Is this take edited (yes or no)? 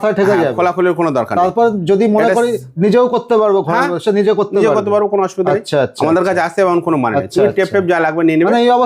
no